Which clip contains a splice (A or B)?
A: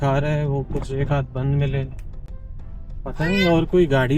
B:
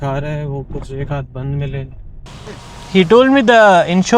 B